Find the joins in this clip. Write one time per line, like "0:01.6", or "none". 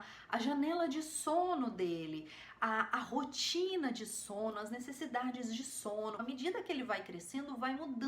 0:06.2